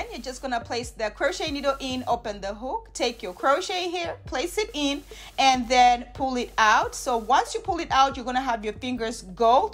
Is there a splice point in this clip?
no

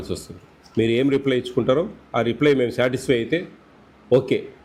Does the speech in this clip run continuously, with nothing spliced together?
yes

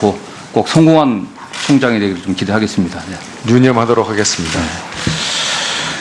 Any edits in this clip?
yes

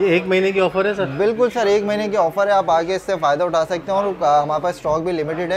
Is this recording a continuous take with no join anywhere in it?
yes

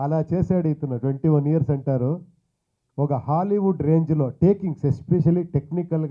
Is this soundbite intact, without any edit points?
yes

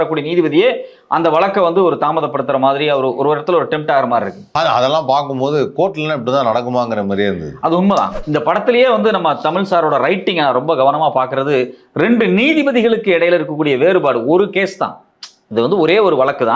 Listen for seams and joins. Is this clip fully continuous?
no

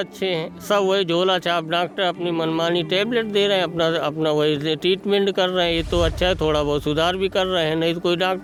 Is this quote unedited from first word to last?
yes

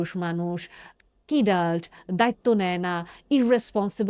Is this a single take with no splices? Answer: yes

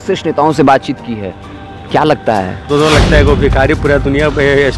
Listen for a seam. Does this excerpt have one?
yes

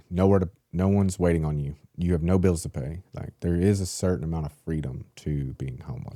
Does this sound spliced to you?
no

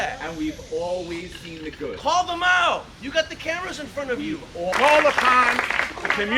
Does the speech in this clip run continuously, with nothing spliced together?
no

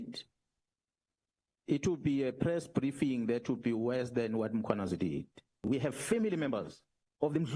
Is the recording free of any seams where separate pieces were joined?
no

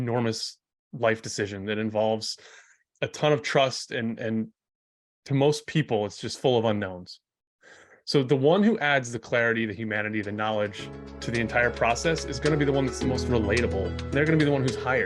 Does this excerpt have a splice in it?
yes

